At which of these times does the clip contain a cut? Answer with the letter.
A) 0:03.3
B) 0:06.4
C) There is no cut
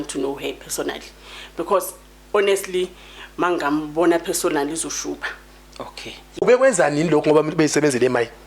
B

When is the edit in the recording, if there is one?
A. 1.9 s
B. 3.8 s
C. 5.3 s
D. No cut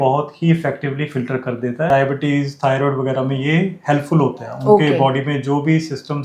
A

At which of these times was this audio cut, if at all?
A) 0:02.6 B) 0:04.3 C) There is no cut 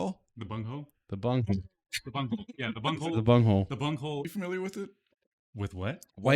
B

